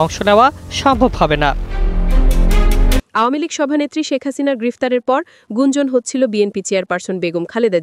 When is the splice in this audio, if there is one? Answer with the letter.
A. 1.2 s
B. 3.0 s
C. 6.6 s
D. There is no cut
B